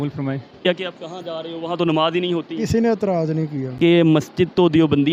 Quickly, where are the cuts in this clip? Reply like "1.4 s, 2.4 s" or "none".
0.7 s, 3.6 s

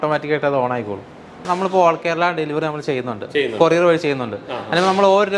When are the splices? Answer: 1.4 s

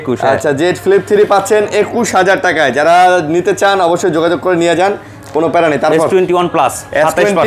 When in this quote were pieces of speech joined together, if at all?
none

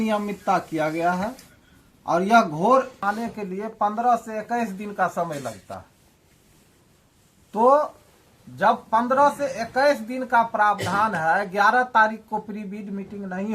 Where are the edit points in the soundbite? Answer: 3.0 s

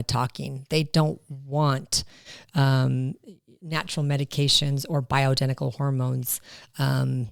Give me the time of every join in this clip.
none

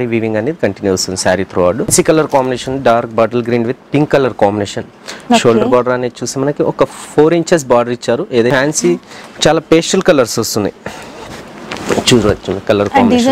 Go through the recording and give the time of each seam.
1.9 s, 8.5 s

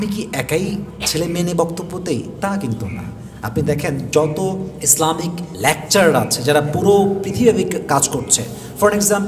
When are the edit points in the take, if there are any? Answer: 5.5 s

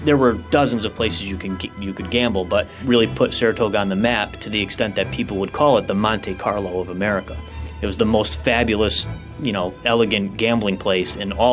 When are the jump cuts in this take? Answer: 2.7 s

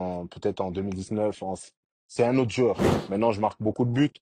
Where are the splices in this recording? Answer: 2.9 s

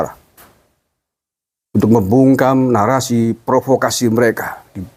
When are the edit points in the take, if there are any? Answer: none

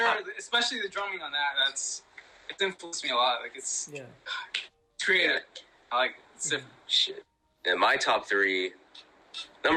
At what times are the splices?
none

